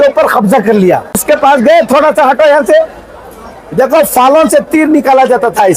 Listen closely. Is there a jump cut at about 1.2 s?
yes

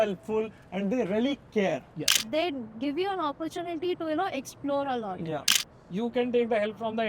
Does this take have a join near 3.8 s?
no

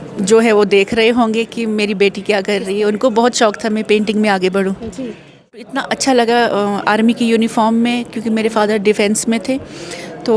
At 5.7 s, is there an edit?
yes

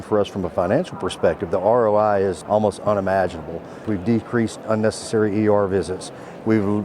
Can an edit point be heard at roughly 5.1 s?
no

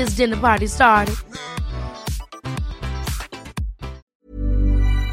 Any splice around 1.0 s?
no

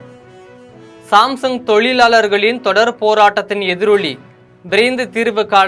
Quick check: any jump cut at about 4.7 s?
no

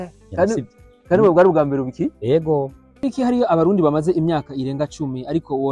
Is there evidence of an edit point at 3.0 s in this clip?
yes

